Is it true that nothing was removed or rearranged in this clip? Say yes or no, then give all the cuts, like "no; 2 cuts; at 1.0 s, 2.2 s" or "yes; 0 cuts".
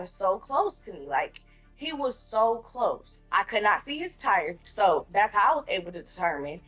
no; 2 cuts; at 3.1 s, 4.6 s